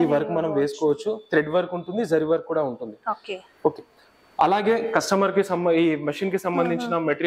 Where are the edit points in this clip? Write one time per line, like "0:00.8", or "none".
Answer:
none